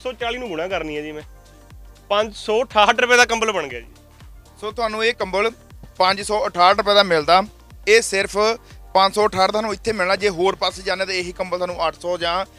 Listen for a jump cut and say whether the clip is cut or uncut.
uncut